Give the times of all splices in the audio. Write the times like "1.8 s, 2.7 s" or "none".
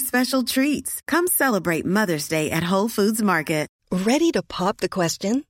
3.8 s